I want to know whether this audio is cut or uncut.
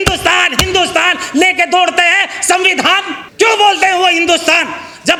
uncut